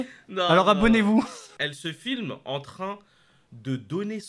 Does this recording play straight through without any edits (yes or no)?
no